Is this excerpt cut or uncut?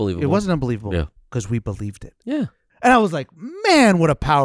cut